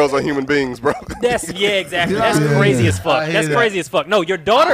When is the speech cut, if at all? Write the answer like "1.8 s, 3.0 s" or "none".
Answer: none